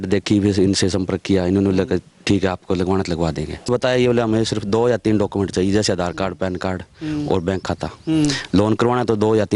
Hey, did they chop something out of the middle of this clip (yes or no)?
yes